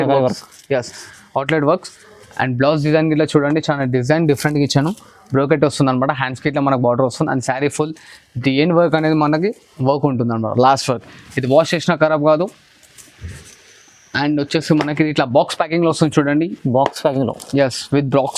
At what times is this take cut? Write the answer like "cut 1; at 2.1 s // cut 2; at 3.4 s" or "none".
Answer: none